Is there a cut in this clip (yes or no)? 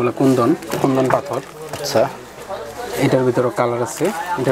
no